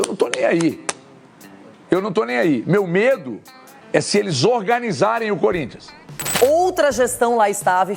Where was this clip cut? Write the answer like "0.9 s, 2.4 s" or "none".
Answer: 6.2 s